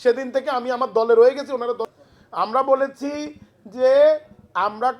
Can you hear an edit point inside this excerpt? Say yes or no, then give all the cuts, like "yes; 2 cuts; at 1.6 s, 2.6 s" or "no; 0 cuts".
yes; 1 cut; at 1.9 s